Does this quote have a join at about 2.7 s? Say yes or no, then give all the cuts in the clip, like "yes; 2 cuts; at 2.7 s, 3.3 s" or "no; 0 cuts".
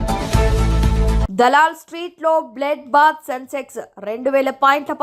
no; 1 cut; at 1.2 s